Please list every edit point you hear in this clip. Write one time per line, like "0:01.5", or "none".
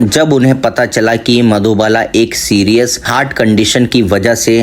none